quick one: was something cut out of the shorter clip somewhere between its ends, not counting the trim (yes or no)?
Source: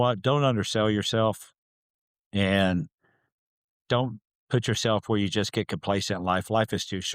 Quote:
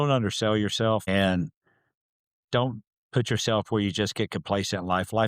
yes